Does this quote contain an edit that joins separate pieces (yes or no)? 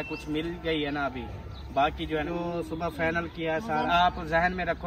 yes